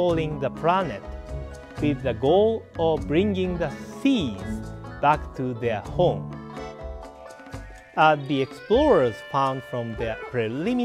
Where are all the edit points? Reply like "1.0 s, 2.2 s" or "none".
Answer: 8.2 s, 9.5 s